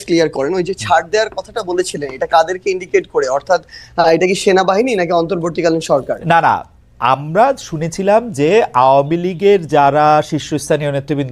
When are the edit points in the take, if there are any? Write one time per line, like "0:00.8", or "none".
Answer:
none